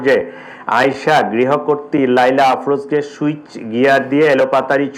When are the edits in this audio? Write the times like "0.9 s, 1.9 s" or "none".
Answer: none